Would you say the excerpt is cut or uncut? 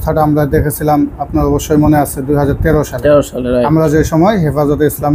uncut